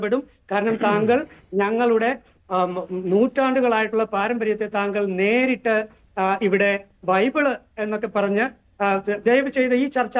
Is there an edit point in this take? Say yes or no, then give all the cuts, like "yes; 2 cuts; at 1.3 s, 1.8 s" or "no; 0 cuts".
no; 0 cuts